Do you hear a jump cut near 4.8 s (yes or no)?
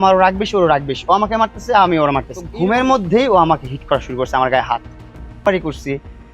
no